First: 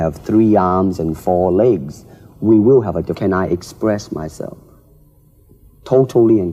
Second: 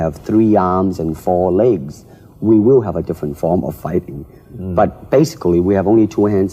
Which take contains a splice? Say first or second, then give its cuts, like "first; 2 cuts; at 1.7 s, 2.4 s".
second; 1 cut; at 3.2 s